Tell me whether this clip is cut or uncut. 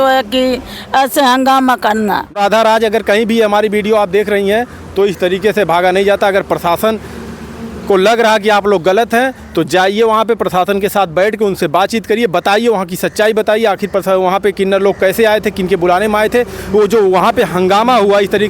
cut